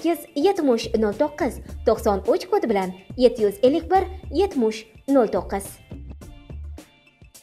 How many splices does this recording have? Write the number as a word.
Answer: one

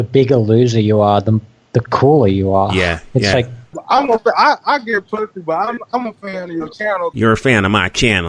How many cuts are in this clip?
two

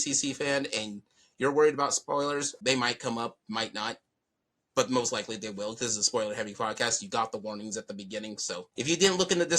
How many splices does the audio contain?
two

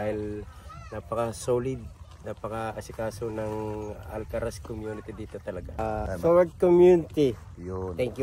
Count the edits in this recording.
one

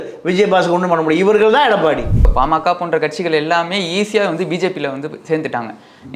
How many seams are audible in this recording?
one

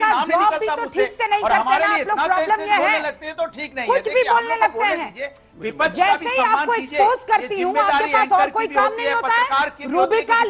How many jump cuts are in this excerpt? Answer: zero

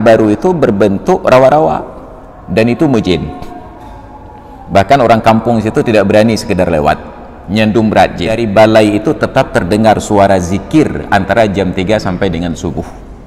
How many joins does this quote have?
one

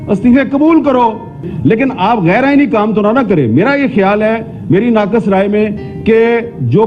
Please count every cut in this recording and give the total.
one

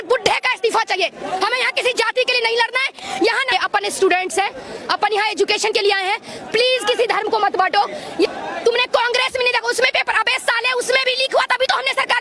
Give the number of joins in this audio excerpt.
two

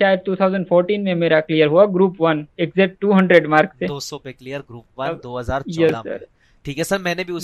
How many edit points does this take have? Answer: zero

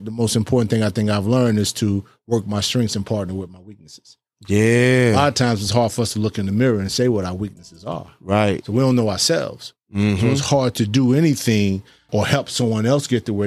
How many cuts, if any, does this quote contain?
one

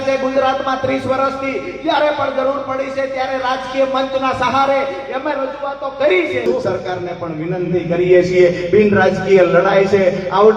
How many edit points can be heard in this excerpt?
one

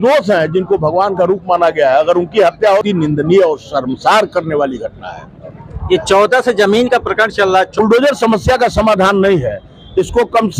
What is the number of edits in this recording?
two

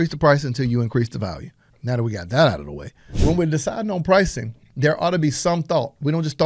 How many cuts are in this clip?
two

